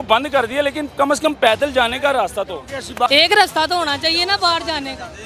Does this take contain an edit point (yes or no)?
yes